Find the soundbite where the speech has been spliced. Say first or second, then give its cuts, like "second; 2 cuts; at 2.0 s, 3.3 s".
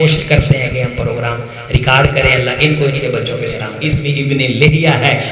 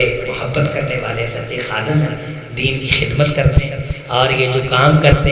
first; 1 cut; at 3.8 s